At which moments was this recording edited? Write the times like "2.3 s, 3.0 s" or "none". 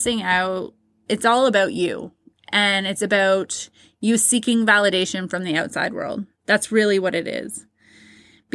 1.0 s